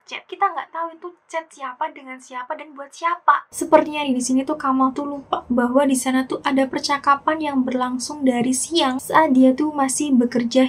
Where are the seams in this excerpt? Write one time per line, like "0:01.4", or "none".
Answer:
none

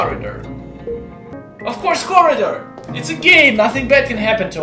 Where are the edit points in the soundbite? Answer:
0:01.4

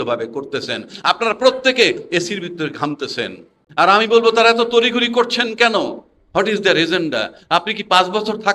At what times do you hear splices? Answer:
0:03.6

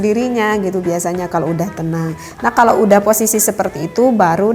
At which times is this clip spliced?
none

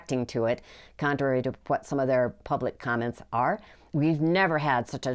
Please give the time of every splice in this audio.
0:03.8

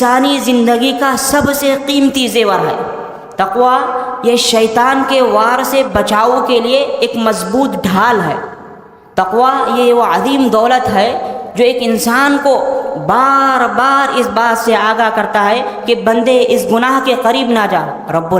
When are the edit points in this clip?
none

